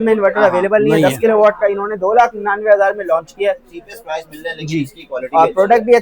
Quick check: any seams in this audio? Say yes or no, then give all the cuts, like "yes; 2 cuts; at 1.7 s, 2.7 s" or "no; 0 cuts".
no; 0 cuts